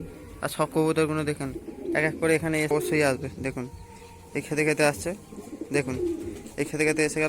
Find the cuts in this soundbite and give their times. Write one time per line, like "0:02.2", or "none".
0:02.7